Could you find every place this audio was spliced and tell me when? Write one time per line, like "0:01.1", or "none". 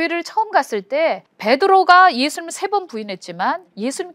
0:01.3